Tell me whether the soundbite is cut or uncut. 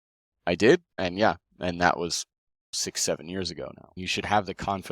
cut